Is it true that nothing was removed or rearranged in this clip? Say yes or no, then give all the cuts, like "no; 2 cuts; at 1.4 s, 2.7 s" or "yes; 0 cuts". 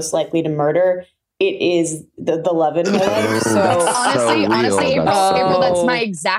yes; 0 cuts